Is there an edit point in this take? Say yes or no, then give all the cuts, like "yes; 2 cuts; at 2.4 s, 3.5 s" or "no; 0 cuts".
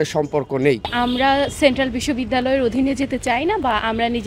yes; 1 cut; at 0.9 s